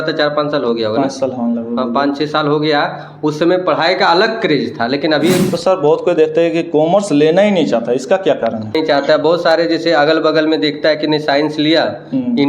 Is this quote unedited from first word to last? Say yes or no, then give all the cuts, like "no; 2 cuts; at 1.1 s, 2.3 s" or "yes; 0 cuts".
no; 2 cuts; at 5.5 s, 8.8 s